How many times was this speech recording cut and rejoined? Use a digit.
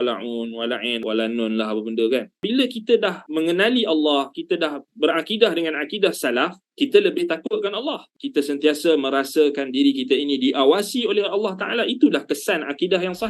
3